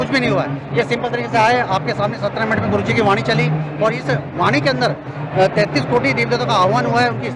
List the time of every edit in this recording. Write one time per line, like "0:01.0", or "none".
none